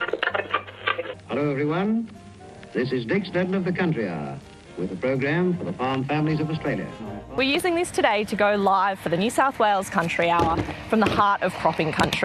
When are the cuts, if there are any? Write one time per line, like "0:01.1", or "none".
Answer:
0:01.1
0:07.3